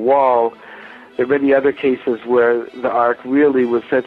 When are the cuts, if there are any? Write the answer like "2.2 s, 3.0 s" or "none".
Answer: none